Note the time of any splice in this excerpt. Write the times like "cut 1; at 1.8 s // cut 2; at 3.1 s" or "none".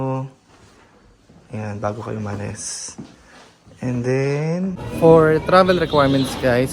cut 1; at 4.7 s